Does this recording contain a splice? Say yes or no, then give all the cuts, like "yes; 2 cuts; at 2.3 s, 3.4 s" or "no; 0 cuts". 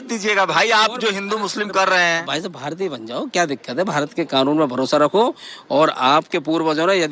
no; 0 cuts